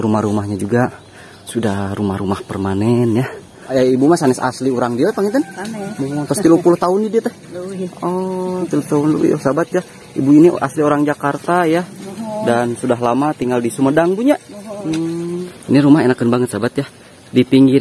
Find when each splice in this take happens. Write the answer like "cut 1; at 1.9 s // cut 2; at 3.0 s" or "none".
cut 1; at 3.7 s // cut 2; at 15.5 s